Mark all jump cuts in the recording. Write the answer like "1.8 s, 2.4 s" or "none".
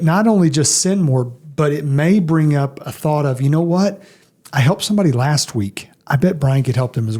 none